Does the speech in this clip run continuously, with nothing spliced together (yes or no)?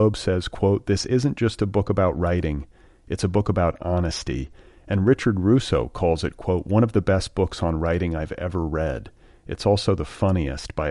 yes